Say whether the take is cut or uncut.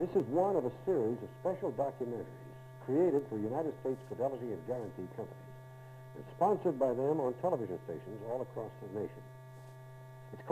uncut